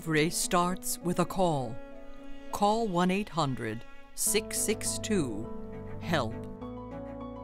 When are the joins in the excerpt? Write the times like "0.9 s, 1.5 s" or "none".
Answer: 6.5 s